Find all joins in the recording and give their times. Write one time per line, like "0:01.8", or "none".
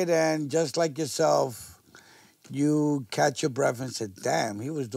none